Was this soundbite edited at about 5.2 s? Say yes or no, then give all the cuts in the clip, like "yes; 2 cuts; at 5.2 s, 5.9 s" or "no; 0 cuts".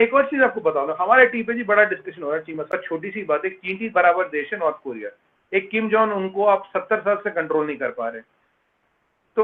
no; 1 cut; at 2.8 s